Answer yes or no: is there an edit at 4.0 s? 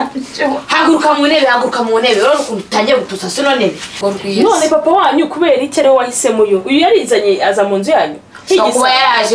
yes